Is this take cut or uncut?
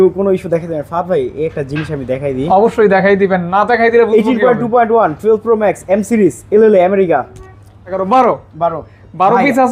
cut